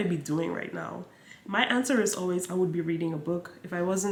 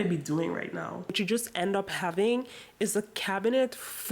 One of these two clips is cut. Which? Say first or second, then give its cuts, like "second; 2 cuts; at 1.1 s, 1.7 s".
second; 1 cut; at 1.2 s